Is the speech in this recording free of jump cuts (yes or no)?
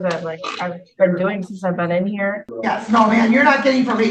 no